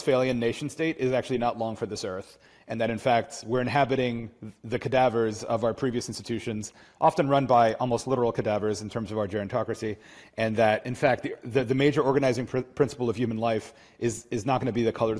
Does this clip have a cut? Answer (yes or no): no